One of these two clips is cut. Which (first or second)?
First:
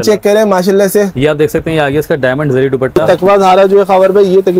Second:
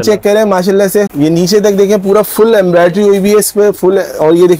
first